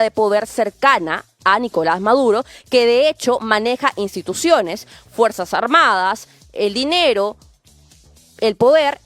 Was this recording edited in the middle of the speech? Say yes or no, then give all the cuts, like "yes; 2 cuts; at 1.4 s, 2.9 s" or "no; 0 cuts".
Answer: no; 0 cuts